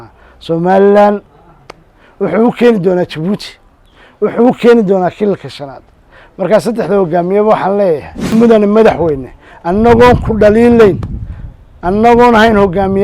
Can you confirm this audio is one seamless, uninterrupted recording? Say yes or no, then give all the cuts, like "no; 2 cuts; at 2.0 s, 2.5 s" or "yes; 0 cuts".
no; 1 cut; at 8.3 s